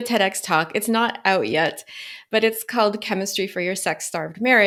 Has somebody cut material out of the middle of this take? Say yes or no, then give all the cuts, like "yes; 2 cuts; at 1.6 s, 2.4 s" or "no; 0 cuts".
no; 0 cuts